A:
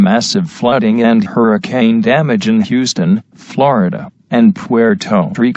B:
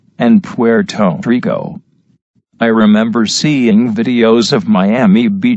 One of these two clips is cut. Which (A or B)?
B